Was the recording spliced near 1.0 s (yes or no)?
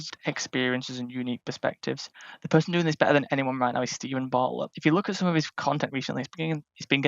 no